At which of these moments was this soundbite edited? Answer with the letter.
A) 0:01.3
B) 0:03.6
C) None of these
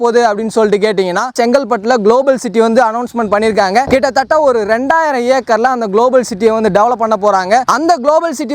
A